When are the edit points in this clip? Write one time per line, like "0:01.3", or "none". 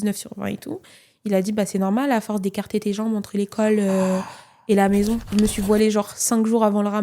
0:05.3